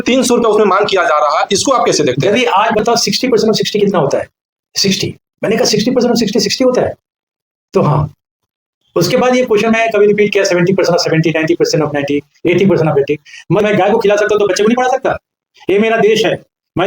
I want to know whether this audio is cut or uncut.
cut